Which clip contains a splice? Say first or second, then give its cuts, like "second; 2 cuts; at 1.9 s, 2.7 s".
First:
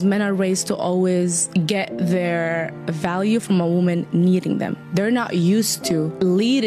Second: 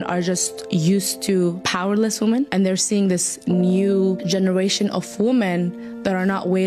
first; 1 cut; at 4.8 s